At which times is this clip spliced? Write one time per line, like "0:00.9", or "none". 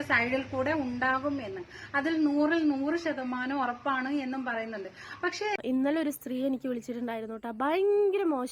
0:05.6